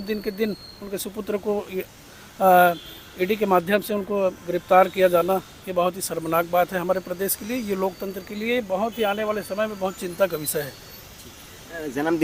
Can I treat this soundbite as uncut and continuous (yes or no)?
yes